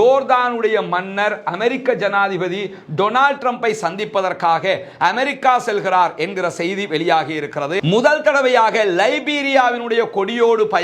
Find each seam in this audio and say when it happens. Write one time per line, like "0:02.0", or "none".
0:07.7

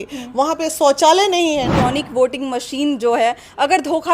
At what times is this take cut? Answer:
0:01.7

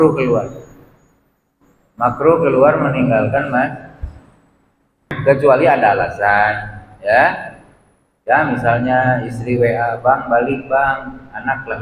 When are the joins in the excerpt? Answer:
0:05.2

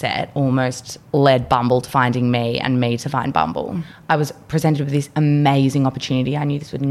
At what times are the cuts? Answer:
0:03.8

